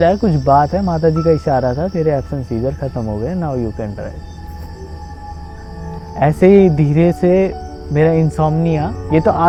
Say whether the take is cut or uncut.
uncut